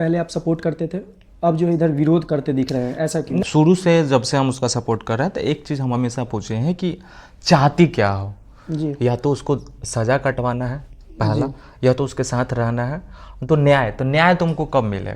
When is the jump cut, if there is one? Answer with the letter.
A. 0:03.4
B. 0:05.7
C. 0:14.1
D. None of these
A